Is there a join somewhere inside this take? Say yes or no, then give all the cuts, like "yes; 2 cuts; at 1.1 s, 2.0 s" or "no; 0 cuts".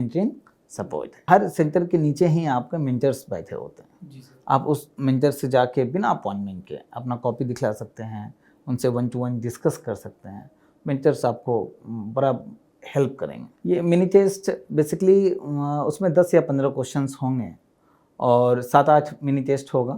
yes; 2 cuts; at 1.2 s, 13.5 s